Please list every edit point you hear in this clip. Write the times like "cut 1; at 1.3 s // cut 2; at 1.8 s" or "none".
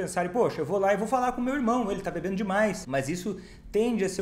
cut 1; at 2.8 s